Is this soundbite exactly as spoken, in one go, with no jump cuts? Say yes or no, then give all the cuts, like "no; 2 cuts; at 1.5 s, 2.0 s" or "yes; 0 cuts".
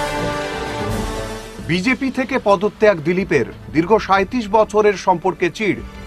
yes; 0 cuts